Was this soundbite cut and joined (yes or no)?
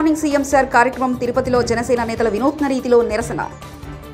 no